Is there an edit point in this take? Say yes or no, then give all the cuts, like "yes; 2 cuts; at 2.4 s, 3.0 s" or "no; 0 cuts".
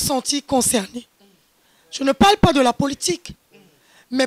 no; 0 cuts